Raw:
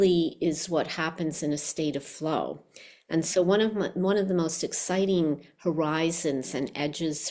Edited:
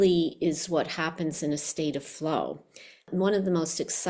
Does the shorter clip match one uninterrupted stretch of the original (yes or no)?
no